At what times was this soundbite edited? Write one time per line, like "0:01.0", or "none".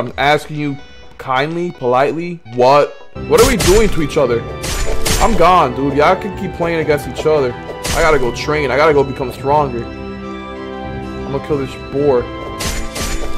0:03.0